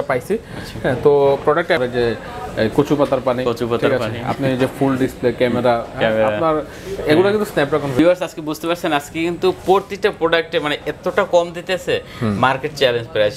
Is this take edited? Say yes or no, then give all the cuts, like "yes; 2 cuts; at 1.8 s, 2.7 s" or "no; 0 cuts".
yes; 2 cuts; at 1.8 s, 8.0 s